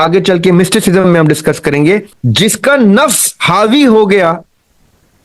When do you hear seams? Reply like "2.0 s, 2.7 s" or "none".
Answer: 2.1 s